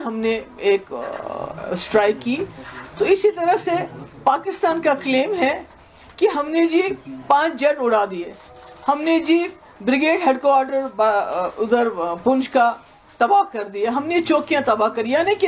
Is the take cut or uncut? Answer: uncut